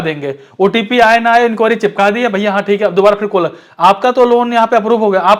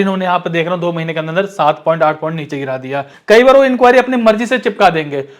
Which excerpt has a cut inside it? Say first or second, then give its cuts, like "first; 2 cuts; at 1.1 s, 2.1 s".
second; 1 cut; at 3.1 s